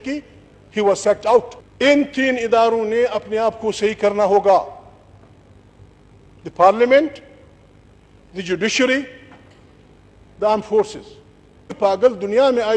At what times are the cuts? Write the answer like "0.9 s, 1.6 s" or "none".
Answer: 1.6 s, 11.8 s